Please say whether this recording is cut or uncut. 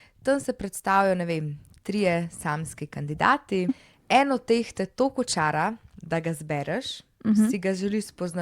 cut